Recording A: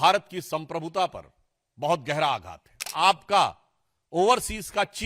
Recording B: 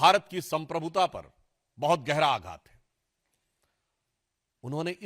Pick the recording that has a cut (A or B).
A